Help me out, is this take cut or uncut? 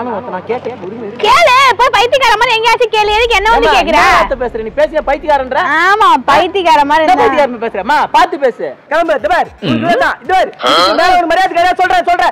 cut